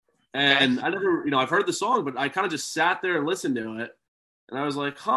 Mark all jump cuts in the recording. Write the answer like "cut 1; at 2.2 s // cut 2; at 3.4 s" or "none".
none